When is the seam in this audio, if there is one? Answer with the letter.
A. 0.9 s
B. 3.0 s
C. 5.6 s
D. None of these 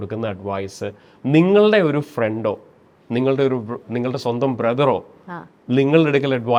D